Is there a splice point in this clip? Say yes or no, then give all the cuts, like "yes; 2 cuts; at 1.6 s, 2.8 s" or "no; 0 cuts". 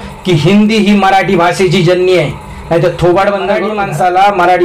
yes; 1 cut; at 3.7 s